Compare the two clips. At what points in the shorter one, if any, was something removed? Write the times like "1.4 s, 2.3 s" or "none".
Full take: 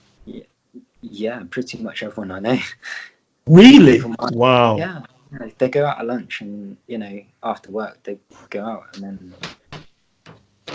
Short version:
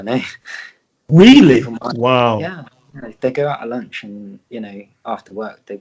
none